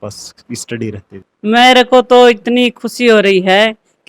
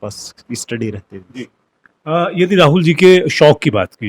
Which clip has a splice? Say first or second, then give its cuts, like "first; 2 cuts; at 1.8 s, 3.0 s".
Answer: first; 1 cut; at 1.2 s